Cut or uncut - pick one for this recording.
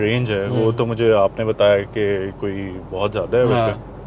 uncut